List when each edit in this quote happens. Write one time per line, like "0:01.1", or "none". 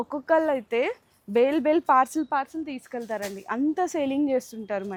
none